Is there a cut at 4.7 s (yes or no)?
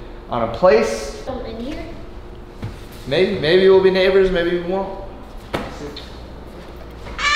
no